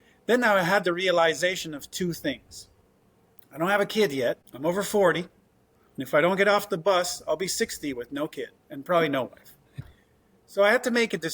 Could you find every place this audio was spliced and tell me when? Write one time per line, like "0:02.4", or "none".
0:04.5
0:09.8